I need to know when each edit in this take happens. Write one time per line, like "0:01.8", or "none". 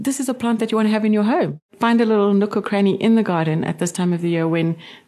0:01.6